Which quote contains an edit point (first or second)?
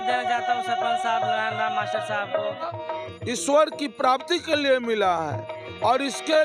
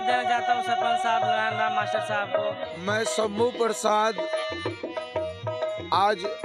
first